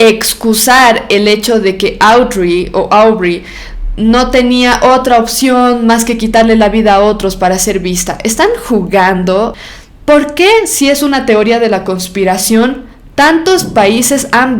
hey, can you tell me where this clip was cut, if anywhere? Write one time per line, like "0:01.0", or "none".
0:09.7